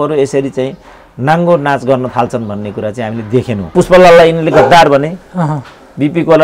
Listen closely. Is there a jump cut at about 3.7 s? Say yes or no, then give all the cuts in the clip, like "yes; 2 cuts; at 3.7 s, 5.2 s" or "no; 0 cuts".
yes; 1 cut; at 3.7 s